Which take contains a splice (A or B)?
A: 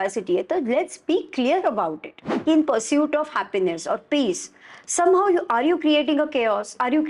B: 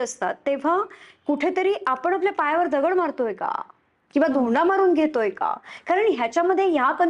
A